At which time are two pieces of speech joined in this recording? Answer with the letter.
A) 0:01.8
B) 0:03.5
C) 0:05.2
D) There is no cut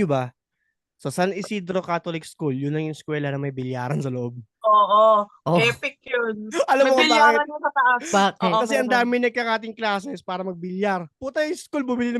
D